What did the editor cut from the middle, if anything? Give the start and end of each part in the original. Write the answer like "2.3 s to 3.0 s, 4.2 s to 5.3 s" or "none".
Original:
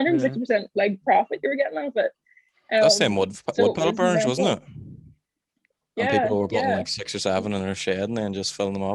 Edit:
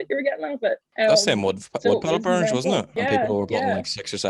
2.2 s to 2.6 s, 4.6 s to 5.9 s